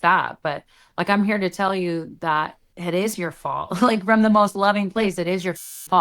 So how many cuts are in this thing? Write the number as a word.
one